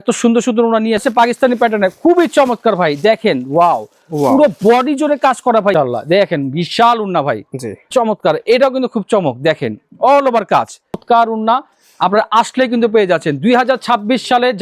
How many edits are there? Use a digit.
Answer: 4